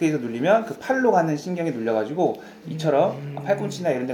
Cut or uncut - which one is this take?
uncut